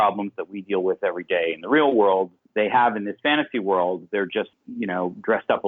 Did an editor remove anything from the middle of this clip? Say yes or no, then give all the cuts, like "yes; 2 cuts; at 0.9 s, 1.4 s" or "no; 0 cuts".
yes; 2 cuts; at 2.4 s, 4.6 s